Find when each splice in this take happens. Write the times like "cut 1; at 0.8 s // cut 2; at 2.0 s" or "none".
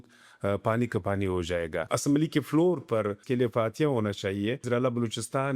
cut 1; at 1.9 s // cut 2; at 3.2 s // cut 3; at 4.6 s